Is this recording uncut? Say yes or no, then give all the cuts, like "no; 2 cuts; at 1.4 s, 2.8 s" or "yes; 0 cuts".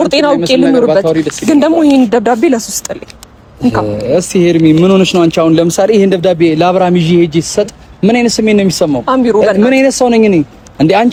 yes; 0 cuts